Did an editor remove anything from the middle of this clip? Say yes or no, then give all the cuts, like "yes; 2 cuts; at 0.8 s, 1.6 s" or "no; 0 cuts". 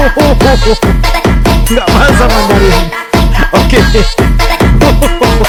no; 0 cuts